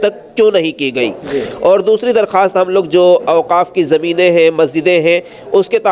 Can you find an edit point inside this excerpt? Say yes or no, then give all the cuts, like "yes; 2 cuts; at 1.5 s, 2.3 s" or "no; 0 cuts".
no; 0 cuts